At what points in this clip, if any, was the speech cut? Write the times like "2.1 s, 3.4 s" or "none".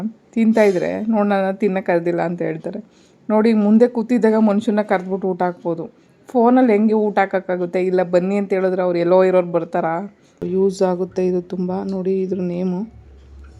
10.4 s